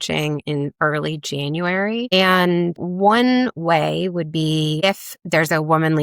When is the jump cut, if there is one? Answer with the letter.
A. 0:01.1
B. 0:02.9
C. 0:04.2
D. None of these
B